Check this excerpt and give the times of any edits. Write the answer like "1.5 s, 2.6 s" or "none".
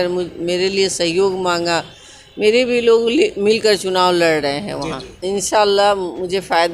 5.1 s